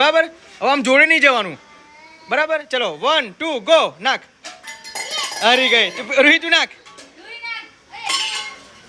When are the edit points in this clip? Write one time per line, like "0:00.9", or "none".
none